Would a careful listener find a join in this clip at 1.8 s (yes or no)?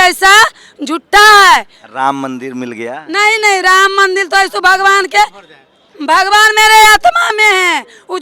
no